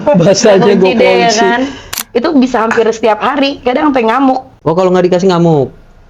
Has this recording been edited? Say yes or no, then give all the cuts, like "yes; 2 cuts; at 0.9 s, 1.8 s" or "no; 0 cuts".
yes; 1 cut; at 2.0 s